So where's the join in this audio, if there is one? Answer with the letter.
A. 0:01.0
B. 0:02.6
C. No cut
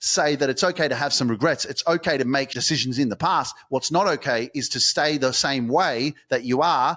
B